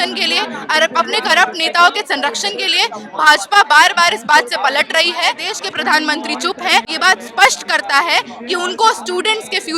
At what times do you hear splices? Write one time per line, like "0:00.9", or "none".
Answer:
0:05.5
0:06.9